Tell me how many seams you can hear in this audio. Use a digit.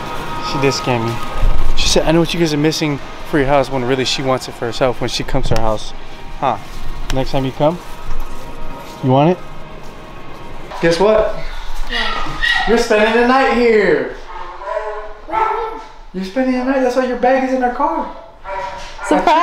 1